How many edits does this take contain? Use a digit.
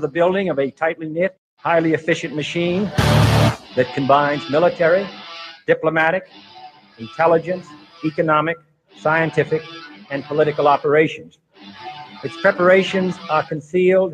0